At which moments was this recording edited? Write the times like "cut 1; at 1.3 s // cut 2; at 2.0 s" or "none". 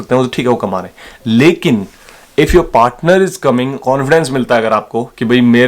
cut 1; at 3.8 s